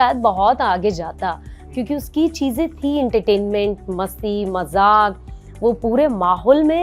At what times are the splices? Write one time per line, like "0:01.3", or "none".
none